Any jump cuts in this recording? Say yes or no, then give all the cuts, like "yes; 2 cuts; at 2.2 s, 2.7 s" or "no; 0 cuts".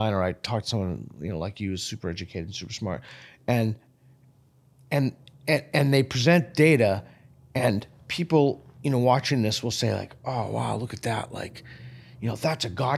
no; 0 cuts